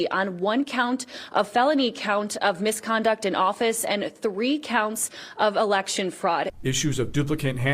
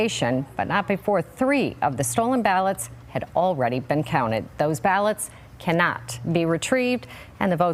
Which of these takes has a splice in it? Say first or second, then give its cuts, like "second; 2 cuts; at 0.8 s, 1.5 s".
first; 1 cut; at 6.5 s